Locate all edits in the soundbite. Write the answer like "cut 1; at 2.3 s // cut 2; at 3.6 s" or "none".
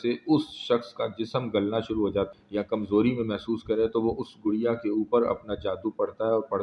cut 1; at 2.3 s